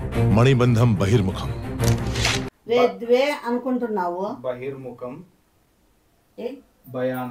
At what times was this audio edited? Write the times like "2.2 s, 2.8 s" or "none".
2.6 s